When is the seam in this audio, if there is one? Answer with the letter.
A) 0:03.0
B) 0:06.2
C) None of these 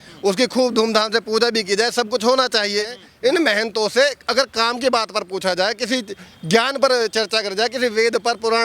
A